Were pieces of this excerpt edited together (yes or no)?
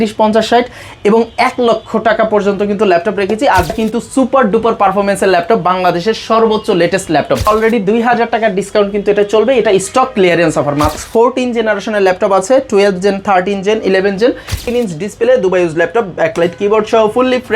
yes